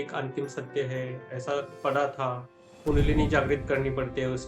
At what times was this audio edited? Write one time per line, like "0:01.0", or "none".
0:01.7